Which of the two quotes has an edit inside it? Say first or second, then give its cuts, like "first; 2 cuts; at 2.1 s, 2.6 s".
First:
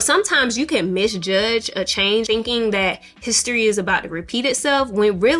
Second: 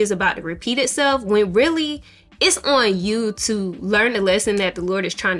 first; 1 cut; at 2.3 s